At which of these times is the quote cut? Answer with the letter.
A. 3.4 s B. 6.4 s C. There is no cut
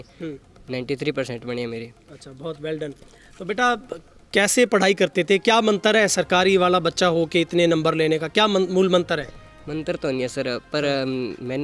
C